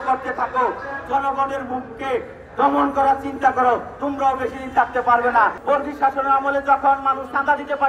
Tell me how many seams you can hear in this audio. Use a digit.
1